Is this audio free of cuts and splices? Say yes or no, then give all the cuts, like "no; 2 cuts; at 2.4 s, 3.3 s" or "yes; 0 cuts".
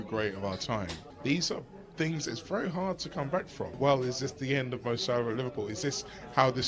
no; 2 cuts; at 1.0 s, 3.8 s